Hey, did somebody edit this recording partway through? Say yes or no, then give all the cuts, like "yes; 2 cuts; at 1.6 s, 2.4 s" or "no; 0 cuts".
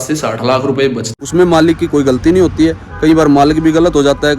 yes; 1 cut; at 1.1 s